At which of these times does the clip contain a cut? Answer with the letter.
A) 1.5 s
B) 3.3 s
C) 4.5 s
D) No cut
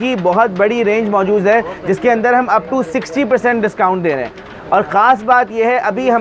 D